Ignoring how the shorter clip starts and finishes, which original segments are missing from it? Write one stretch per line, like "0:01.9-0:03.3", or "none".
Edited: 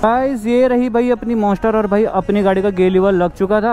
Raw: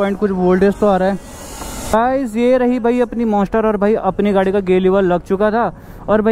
none